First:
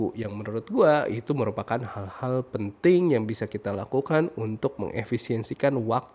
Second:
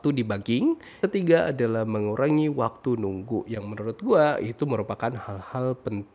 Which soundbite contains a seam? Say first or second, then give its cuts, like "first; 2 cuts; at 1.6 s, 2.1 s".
second; 1 cut; at 1.0 s